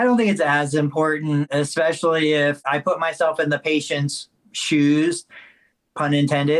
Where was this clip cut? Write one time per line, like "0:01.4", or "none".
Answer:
0:01.5
0:02.6